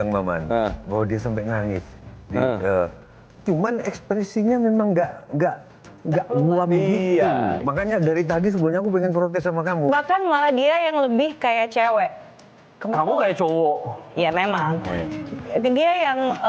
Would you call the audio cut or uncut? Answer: cut